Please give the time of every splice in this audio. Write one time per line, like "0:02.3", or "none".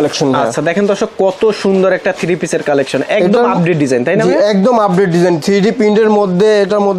none